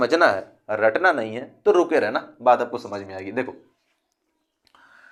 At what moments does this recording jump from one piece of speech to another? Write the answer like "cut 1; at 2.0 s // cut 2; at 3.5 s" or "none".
none